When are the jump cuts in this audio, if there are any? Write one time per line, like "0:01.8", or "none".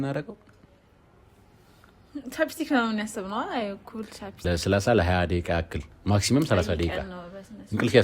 0:04.4